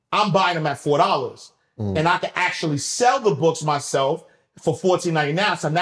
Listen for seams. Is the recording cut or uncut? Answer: uncut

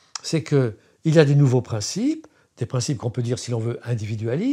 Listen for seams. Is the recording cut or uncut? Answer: uncut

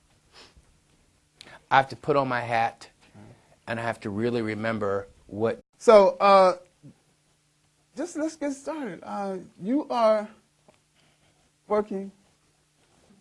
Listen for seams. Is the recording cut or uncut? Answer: uncut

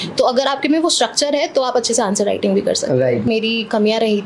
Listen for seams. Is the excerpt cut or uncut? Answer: cut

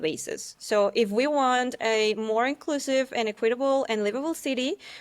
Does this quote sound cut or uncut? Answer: uncut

